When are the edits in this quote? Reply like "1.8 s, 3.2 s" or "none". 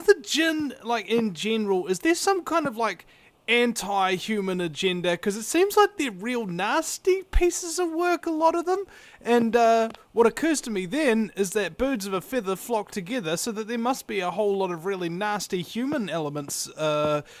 12.1 s